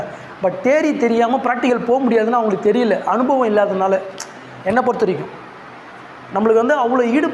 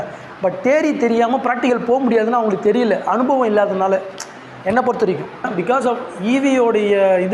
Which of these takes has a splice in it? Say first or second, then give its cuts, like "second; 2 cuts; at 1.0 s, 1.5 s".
second; 1 cut; at 5.5 s